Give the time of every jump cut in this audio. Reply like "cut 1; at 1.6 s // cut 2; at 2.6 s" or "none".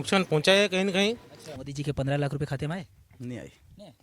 cut 1; at 1.6 s